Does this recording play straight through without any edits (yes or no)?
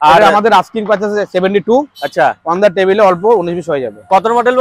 yes